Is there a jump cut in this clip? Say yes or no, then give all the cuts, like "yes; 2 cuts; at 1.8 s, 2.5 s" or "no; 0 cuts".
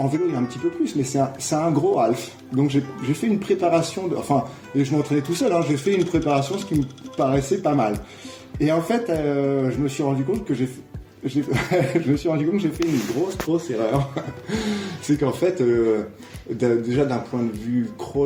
no; 0 cuts